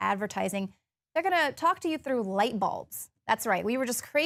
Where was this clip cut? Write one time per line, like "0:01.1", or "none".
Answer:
none